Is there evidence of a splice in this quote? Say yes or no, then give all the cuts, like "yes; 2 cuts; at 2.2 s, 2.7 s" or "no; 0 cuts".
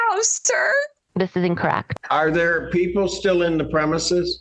yes; 1 cut; at 1.9 s